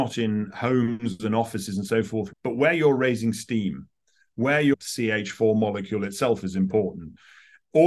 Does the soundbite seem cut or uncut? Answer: cut